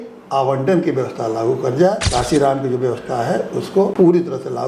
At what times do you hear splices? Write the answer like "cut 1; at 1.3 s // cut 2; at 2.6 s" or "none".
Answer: cut 1; at 2.0 s // cut 2; at 3.9 s